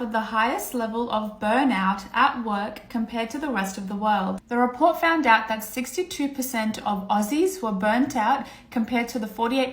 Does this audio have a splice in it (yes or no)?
no